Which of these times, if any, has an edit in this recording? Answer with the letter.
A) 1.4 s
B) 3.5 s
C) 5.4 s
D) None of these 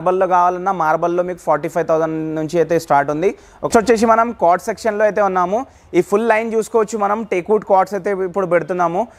B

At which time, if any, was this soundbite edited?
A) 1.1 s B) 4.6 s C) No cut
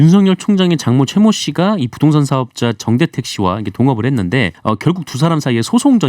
B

